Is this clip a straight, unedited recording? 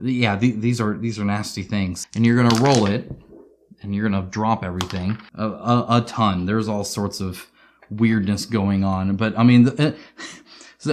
no; 2 cuts; at 2.0 s, 5.3 s

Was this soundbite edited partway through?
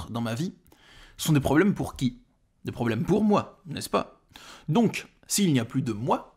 no; 0 cuts

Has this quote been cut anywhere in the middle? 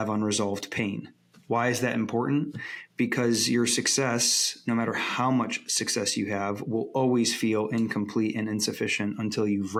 no; 0 cuts

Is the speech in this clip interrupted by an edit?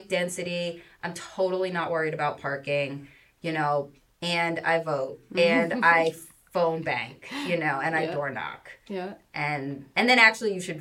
no; 0 cuts

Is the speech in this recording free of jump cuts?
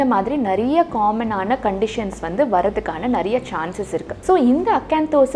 no; 1 cut; at 4.1 s

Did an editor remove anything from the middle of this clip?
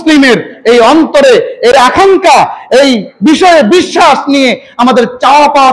yes; 1 cut; at 1.7 s

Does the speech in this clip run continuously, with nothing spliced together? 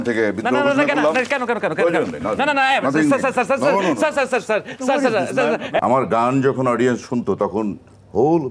no; 1 cut; at 5.8 s

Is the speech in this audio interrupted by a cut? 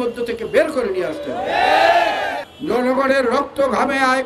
yes; 1 cut; at 2.5 s

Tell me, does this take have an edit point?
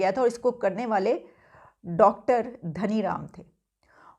no; 0 cuts

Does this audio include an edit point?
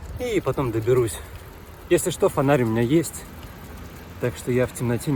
no; 0 cuts

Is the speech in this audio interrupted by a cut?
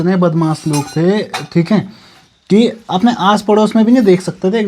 no; 0 cuts

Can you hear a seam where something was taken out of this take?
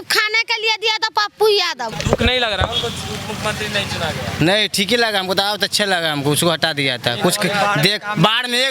yes; 1 cut; at 1.9 s

